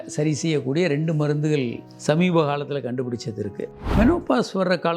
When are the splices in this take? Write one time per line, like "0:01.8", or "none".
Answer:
0:03.8